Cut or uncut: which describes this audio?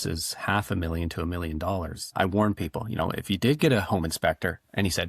cut